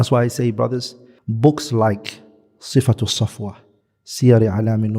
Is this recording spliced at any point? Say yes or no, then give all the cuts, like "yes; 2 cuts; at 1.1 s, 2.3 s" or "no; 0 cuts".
no; 0 cuts